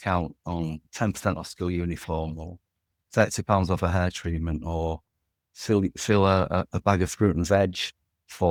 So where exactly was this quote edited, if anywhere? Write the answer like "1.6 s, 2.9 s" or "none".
none